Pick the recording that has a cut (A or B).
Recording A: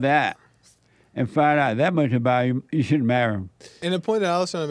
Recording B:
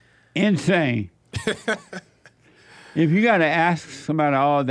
A